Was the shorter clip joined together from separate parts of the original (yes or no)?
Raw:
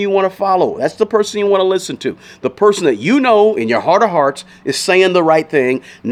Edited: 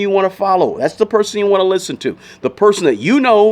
no